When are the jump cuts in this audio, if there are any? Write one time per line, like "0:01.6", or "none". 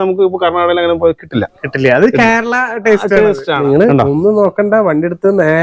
0:03.6